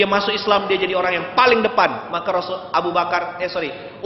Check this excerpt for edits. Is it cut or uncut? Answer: uncut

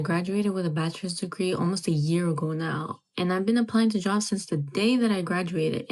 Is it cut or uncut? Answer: uncut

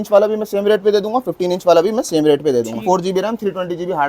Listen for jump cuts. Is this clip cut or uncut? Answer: cut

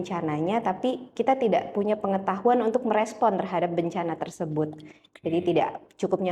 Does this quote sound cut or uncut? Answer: uncut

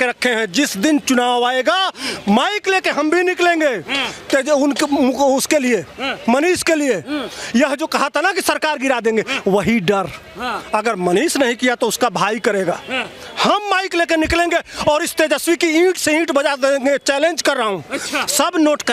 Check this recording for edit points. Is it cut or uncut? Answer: uncut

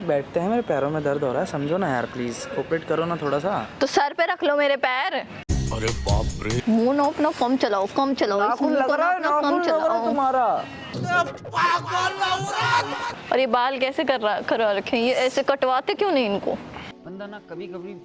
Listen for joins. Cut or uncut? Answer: cut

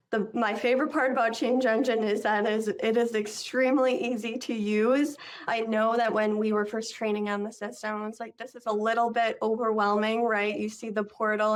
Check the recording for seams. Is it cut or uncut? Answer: uncut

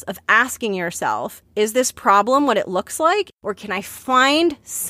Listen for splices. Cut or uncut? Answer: cut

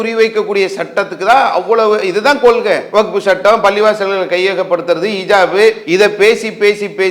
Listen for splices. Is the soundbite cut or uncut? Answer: cut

